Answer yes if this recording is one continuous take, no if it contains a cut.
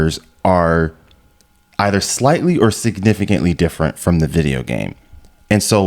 yes